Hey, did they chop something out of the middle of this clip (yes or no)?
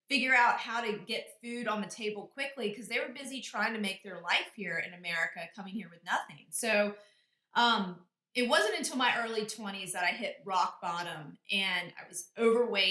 no